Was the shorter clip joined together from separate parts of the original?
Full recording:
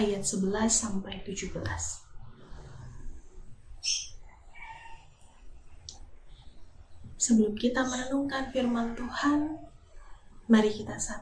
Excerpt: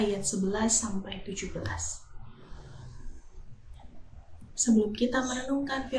yes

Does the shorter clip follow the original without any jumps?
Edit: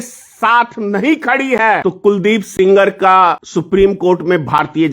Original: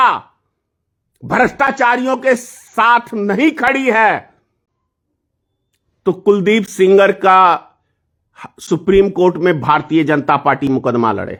no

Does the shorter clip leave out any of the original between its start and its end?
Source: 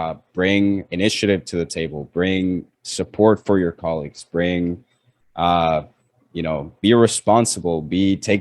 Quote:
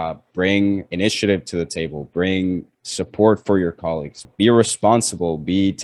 yes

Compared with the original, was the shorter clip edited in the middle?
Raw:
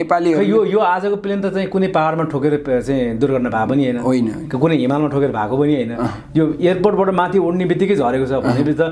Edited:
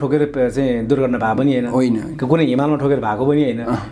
no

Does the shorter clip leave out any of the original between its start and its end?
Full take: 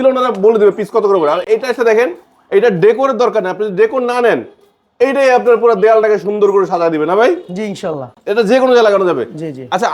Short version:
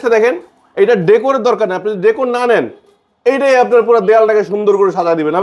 no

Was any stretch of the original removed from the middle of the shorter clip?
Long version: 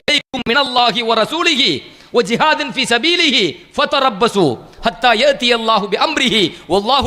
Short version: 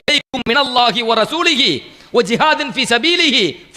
no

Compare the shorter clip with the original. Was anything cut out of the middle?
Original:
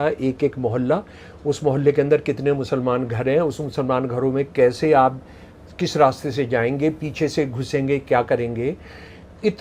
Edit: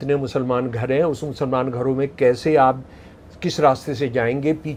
no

